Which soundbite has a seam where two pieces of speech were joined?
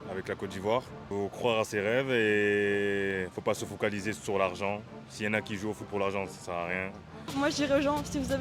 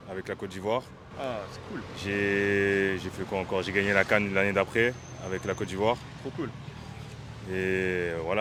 first; 2 cuts; at 1.0 s, 7.3 s

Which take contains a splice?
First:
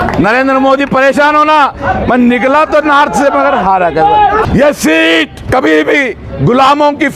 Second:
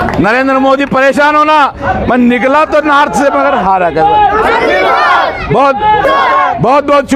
first; 2 cuts; at 4.4 s, 5.4 s

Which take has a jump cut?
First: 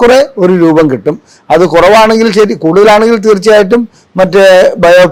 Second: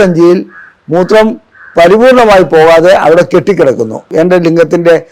second; 1 cut; at 4.0 s

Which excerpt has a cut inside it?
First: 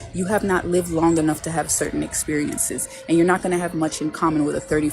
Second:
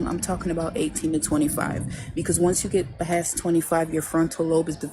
first; 1 cut; at 2.6 s

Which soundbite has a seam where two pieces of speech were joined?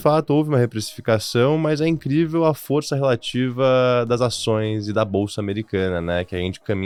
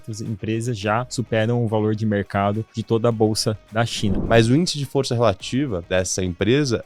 second; 4 cuts; at 1.1 s, 2.7 s, 4.2 s, 5.8 s

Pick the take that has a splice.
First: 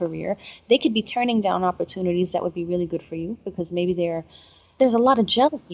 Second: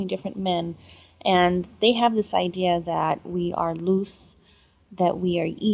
first; 1 cut; at 4.7 s

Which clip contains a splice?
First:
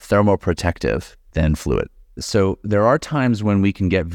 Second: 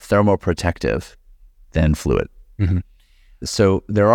first; 2 cuts; at 1.2 s, 2.0 s

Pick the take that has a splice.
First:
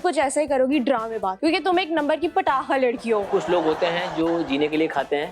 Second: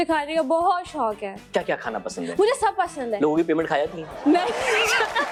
first; 2 cuts; at 1.3 s, 3.3 s

